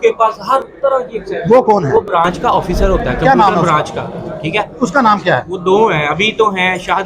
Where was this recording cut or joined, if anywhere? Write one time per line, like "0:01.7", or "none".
none